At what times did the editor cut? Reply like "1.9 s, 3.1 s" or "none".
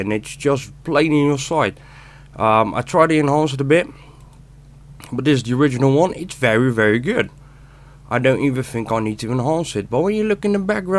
9.4 s